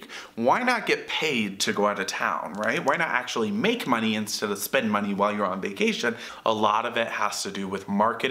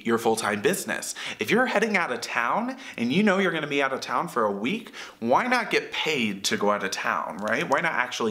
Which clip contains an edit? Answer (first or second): first